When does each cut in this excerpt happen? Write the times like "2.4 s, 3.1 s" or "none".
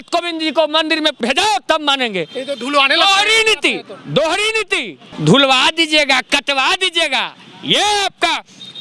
1.2 s, 5.0 s